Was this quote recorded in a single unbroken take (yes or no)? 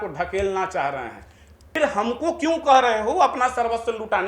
no